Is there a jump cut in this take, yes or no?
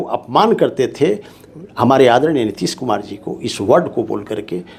no